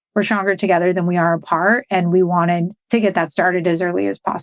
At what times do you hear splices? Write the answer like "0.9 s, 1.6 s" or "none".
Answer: 2.8 s

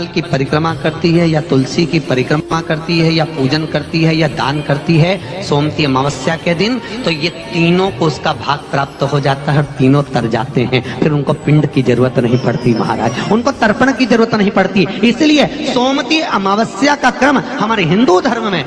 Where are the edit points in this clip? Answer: none

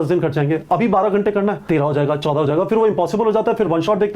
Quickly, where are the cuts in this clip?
1.6 s

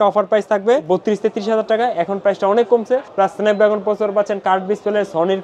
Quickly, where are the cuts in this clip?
0.9 s, 3.1 s

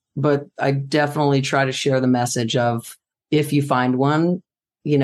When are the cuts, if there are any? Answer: none

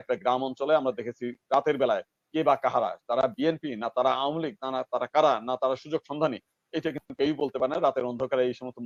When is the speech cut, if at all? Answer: none

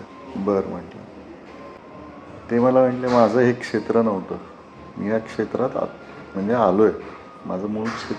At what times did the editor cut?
1.8 s

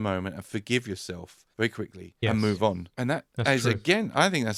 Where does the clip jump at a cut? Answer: none

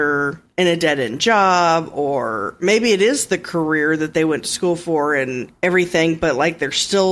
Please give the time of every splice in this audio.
none

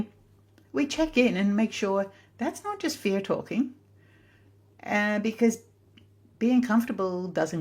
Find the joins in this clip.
none

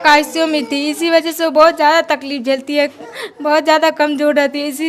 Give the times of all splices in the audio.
none

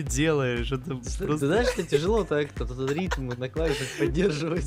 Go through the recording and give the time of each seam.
none

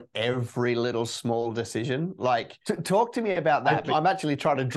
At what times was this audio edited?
2.5 s, 3.8 s

